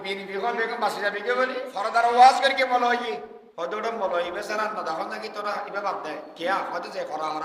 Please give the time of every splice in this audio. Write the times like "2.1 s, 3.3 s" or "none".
1.7 s, 3.4 s